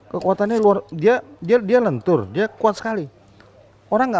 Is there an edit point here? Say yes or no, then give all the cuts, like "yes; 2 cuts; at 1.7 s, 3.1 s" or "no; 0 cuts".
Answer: no; 0 cuts